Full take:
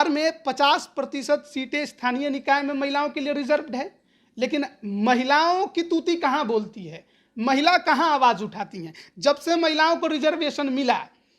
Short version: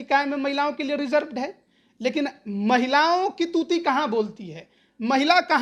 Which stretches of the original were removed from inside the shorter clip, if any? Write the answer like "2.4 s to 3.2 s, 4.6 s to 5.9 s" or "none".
none